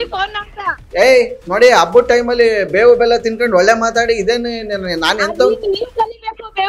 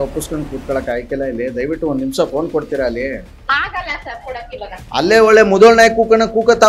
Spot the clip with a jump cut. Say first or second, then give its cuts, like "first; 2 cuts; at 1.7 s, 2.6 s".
second; 1 cut; at 4.8 s